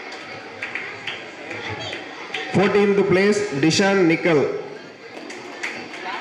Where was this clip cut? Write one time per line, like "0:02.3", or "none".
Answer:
0:05.1